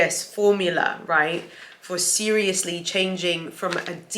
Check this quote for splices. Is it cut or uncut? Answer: uncut